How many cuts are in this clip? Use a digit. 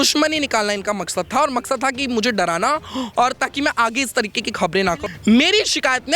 1